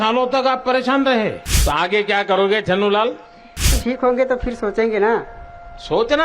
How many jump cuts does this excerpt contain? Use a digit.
2